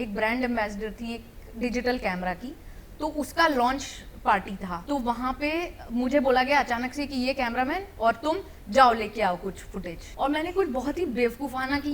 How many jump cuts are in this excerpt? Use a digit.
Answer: 2